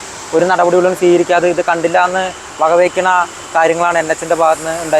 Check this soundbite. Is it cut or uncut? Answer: uncut